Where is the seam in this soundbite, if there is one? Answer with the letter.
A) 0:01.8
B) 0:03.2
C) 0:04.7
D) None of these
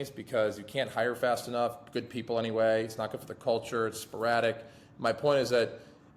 D